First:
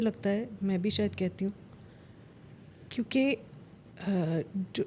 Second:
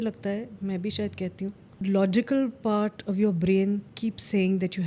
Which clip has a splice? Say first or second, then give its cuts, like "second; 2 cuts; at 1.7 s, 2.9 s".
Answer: second; 2 cuts; at 1.8 s, 3.9 s